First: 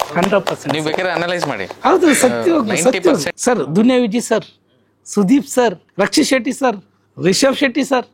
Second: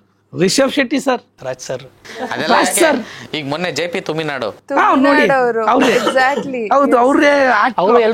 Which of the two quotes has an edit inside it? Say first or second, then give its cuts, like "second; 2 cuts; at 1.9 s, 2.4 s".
first; 2 cuts; at 3.3 s, 5.8 s